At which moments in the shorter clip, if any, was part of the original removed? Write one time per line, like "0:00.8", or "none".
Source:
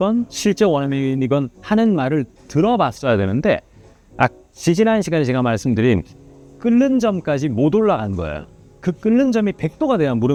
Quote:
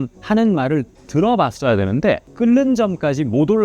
0:02.3